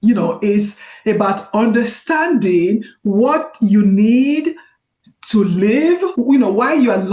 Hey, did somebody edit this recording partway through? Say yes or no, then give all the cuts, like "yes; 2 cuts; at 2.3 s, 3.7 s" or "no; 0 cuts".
yes; 1 cut; at 6.1 s